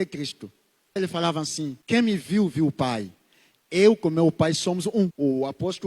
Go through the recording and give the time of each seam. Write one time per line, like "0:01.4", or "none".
0:01.0
0:01.8
0:05.1